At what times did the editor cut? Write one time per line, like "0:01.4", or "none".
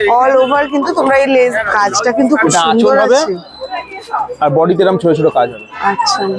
0:01.5